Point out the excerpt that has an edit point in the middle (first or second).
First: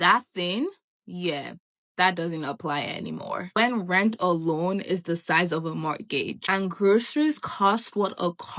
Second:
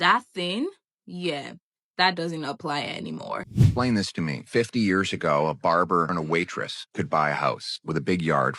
second